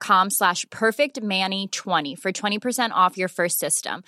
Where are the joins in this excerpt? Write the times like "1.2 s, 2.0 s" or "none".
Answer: none